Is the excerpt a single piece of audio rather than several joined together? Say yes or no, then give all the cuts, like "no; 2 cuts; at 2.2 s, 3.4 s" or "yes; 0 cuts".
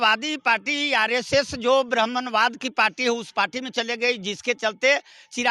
yes; 0 cuts